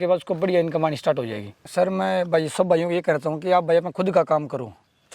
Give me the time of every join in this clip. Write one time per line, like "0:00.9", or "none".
0:01.6